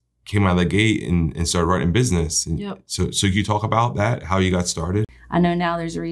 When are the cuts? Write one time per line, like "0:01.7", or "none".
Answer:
0:05.2